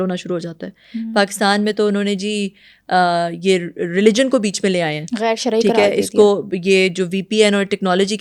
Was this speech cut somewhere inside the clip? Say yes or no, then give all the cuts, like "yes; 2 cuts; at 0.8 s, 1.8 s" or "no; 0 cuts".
no; 0 cuts